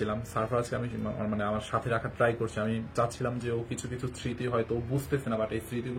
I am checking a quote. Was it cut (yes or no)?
no